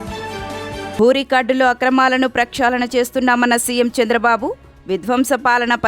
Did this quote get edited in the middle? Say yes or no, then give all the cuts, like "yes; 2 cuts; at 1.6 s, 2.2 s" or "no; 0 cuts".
yes; 1 cut; at 0.9 s